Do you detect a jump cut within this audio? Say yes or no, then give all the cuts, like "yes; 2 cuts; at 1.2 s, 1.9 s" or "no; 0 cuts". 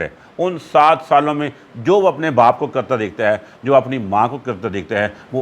no; 0 cuts